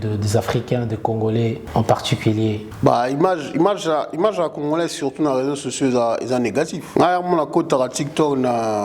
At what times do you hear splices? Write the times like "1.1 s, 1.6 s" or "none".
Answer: 1.6 s, 2.7 s, 6.8 s